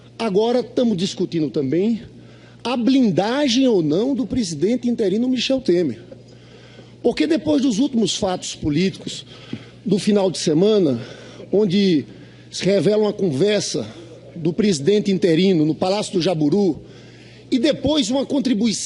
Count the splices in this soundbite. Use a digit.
1